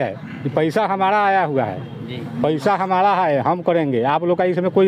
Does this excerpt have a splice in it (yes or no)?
no